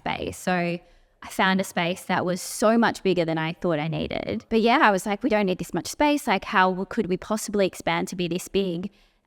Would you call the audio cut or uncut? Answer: cut